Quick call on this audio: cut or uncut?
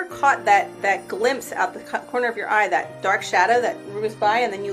uncut